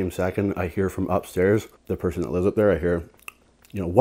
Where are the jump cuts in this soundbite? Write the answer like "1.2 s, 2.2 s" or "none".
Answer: 1.8 s